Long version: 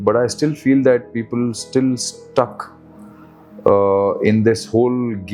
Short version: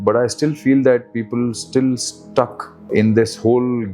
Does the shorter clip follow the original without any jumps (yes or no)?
no